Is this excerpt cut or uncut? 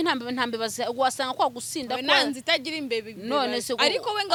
uncut